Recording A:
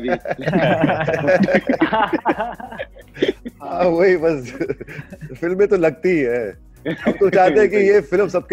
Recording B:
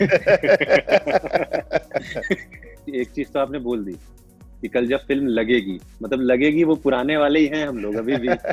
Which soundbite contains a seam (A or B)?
B